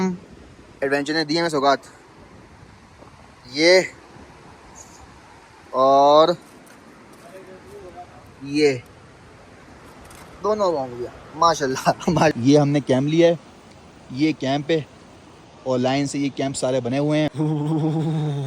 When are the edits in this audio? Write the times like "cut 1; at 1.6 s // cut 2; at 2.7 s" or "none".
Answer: cut 1; at 12.3 s // cut 2; at 17.3 s